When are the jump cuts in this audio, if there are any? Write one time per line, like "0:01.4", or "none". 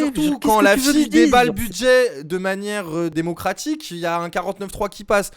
0:03.2

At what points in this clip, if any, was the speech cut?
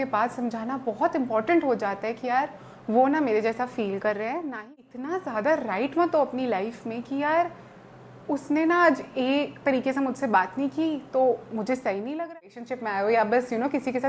0:04.7
0:12.3

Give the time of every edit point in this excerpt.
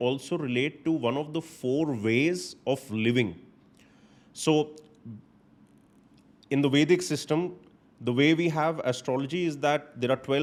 none

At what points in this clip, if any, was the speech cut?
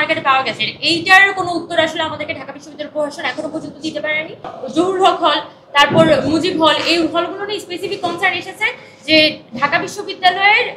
0:04.6

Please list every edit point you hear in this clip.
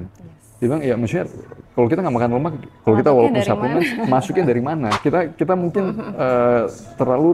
0:05.0

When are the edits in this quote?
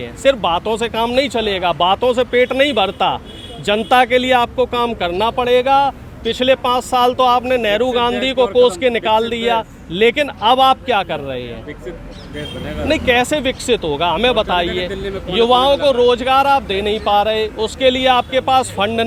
none

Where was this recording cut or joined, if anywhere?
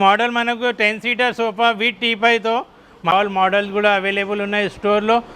0:03.1

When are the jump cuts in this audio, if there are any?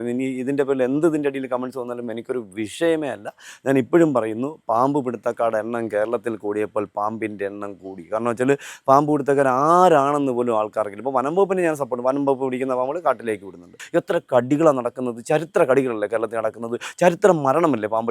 0:13.8

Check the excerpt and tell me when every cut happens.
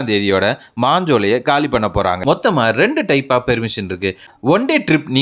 0:02.2

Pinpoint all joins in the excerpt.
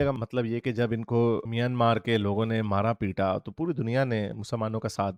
none

